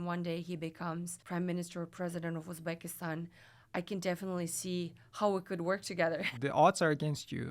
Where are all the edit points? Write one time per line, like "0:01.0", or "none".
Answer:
0:06.3